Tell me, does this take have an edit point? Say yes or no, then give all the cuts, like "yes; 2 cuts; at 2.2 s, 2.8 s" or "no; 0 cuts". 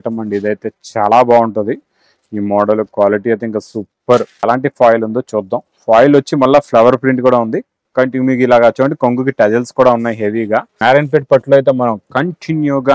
yes; 2 cuts; at 4.4 s, 10.7 s